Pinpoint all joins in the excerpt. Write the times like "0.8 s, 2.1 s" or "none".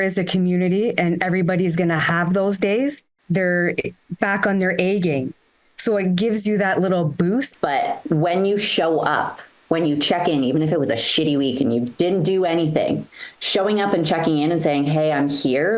3.1 s, 7.5 s